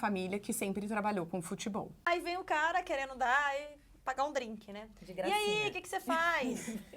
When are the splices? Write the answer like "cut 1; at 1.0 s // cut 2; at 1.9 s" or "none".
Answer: cut 1; at 2.1 s